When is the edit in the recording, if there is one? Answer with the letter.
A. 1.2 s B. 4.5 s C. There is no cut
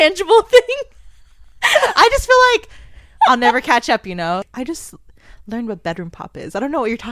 B